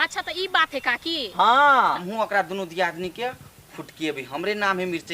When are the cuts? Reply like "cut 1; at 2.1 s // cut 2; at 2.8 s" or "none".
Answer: cut 1; at 2.0 s